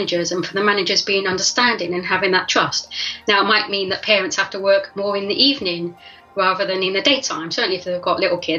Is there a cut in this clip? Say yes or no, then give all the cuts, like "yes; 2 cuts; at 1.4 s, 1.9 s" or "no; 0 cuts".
no; 0 cuts